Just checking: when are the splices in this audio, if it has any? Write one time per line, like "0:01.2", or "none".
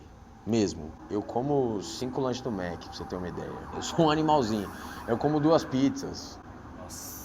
0:00.9
0:03.7